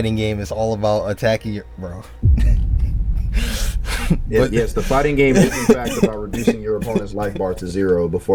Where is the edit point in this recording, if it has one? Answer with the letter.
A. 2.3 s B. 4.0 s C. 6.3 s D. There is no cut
D